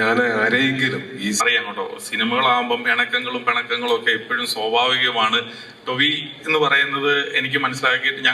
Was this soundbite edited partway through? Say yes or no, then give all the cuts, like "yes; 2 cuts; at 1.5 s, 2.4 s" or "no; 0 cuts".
yes; 1 cut; at 1.4 s